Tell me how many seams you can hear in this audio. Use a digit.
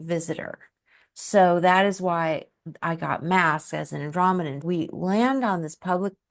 1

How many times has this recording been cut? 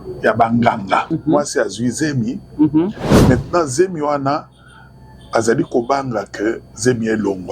1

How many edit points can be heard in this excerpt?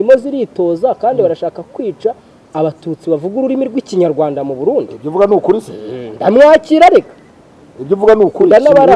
0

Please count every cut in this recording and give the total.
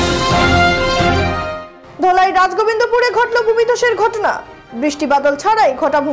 1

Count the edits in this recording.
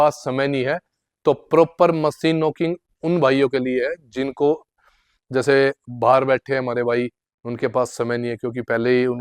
0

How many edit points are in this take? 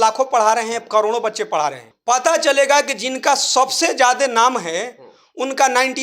1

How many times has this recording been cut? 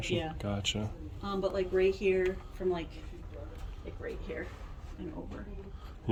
0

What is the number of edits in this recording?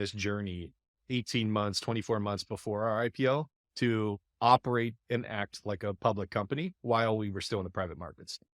1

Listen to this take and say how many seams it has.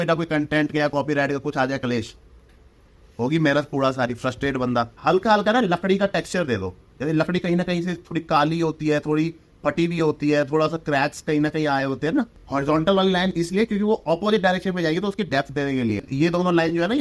3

